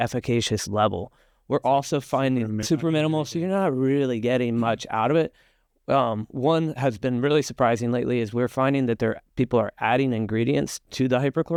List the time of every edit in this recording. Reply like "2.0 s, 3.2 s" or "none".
none